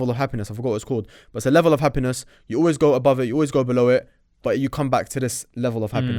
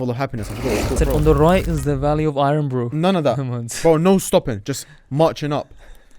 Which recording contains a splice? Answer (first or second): second